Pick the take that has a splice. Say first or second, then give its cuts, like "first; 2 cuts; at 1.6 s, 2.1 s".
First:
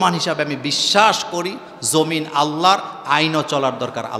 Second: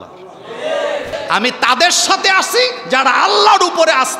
second; 1 cut; at 1.1 s